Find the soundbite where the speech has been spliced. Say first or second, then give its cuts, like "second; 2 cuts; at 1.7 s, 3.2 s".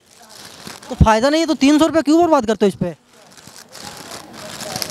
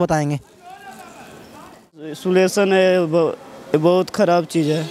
second; 1 cut; at 2.0 s